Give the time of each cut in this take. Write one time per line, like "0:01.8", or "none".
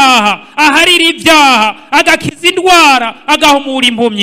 none